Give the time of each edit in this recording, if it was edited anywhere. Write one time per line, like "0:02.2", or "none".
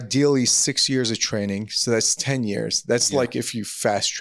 none